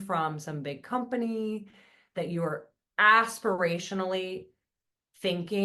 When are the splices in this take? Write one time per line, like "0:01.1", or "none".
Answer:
none